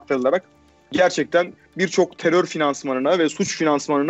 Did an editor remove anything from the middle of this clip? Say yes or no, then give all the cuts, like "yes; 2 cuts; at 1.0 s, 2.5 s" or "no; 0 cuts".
no; 0 cuts